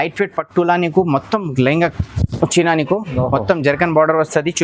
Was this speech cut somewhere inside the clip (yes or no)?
no